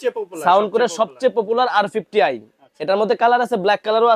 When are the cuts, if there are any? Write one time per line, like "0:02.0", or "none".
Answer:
none